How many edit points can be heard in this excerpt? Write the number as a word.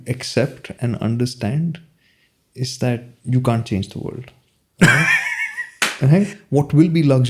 one